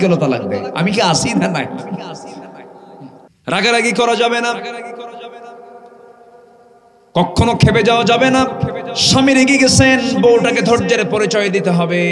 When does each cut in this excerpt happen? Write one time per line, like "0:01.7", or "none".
0:03.3